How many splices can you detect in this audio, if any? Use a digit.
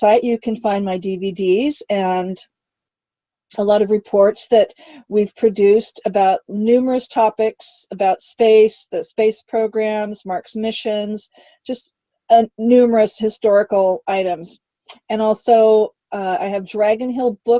1